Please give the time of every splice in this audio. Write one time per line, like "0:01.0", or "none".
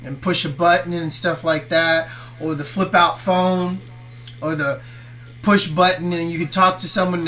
none